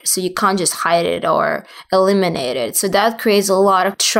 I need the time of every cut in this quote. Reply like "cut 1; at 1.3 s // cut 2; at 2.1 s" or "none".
none